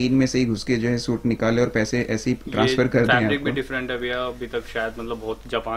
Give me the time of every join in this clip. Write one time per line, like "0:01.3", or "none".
none

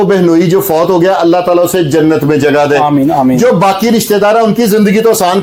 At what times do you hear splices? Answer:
none

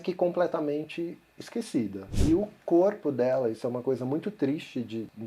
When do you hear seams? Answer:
0:02.1

